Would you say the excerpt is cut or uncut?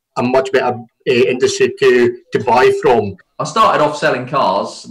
cut